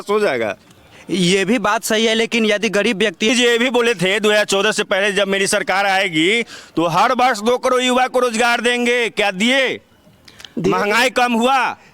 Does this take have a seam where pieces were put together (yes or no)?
yes